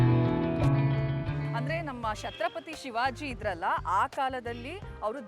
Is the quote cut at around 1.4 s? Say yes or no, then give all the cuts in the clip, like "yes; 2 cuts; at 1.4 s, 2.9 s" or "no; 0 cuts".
yes; 1 cut; at 1.4 s